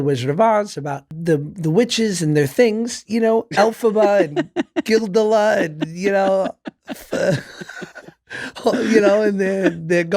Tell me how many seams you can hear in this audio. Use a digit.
1